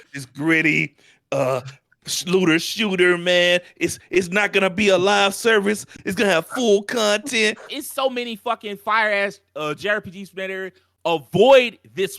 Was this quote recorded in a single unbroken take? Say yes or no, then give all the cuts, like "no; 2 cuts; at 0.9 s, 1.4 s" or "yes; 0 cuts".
no; 1 cut; at 7.7 s